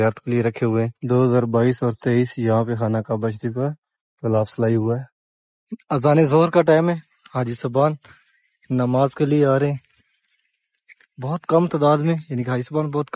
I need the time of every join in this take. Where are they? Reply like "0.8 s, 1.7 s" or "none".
1.0 s